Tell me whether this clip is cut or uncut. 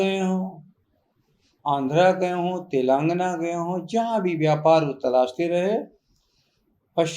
uncut